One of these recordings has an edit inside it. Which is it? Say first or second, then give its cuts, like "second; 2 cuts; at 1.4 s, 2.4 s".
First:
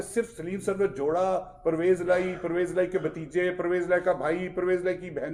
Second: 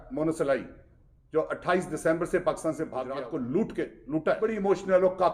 second; 2 cuts; at 3.0 s, 4.4 s